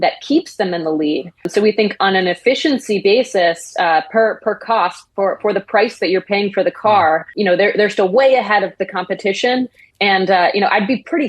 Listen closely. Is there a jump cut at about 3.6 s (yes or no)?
no